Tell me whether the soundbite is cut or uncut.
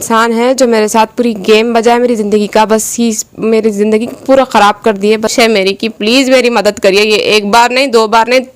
cut